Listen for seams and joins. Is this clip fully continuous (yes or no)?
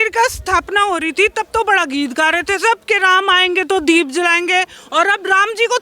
yes